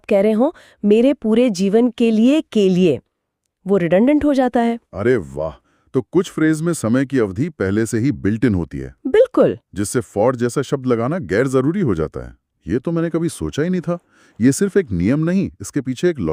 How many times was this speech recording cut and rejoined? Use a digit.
0